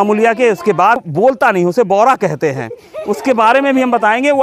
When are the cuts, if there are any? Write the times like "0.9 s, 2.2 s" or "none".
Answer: 1.0 s